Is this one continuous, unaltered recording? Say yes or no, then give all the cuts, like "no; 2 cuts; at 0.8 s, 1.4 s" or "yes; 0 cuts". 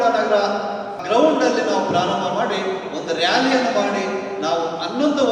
no; 1 cut; at 0.9 s